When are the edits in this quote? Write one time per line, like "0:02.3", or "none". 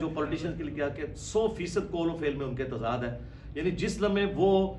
none